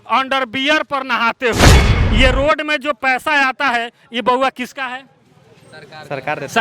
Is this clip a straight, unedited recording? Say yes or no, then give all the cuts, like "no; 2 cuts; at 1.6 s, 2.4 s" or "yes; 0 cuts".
no; 1 cut; at 1.9 s